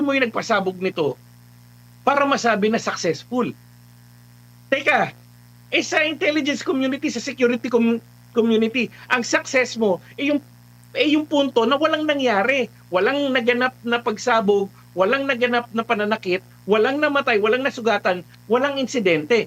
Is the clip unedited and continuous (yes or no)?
yes